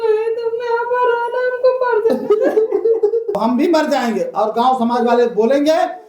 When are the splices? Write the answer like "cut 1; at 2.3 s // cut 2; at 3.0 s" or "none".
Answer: cut 1; at 3.4 s